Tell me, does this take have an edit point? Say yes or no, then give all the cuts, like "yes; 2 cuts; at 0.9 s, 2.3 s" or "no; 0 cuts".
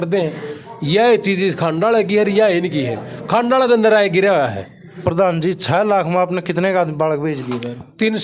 yes; 1 cut; at 5.0 s